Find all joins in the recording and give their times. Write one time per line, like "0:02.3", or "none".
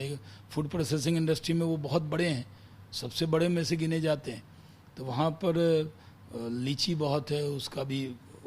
none